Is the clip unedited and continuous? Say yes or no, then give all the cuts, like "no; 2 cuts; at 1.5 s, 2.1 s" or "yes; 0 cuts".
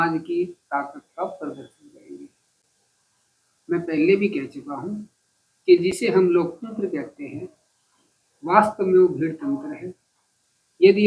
yes; 0 cuts